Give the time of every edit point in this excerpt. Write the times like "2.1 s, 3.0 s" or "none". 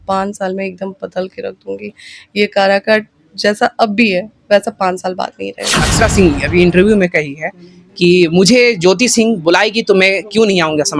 5.8 s